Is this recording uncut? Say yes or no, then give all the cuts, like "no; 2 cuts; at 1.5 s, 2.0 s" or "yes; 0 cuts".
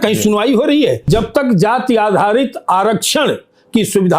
no; 1 cut; at 1.0 s